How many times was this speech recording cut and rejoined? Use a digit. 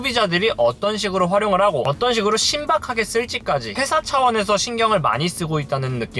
0